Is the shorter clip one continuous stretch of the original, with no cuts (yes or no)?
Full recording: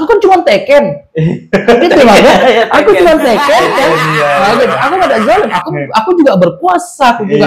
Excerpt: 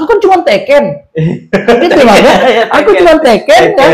yes